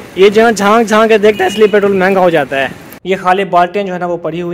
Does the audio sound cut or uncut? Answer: cut